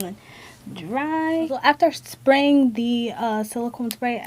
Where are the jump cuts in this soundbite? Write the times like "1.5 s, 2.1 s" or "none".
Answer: 1.6 s